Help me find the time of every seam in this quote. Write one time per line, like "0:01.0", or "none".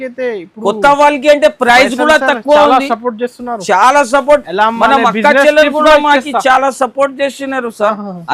none